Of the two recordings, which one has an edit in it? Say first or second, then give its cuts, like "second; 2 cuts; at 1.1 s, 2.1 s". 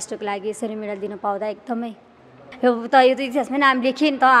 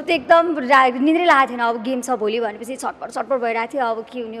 first; 1 cut; at 2.4 s